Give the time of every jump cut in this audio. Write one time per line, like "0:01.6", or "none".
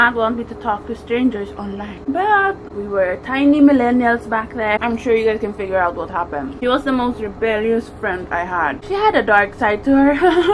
0:01.9
0:02.7
0:04.8
0:06.5
0:08.8